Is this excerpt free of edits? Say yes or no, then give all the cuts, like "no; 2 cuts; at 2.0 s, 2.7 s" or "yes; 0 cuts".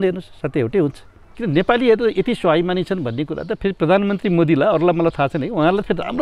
no; 1 cut; at 1.3 s